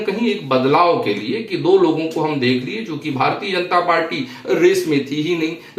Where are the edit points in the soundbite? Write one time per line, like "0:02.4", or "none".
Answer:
none

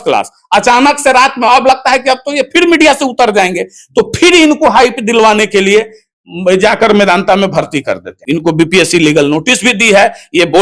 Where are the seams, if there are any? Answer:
0:08.1

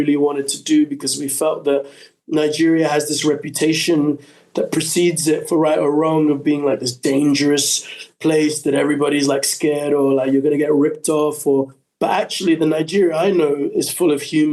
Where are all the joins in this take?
none

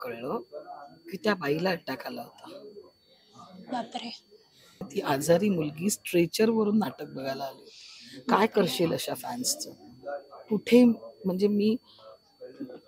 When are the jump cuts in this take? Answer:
0:04.9

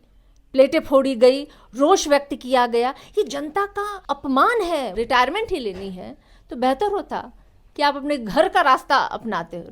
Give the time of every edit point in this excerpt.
0:04.0
0:04.9

